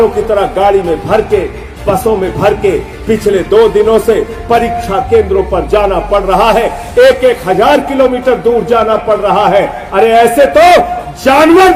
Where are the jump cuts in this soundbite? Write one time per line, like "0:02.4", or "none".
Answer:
none